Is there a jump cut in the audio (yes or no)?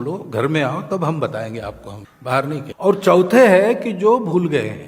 yes